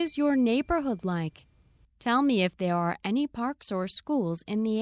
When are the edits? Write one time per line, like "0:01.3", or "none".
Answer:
none